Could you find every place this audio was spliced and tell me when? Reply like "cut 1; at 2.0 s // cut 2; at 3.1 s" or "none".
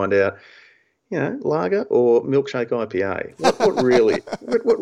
none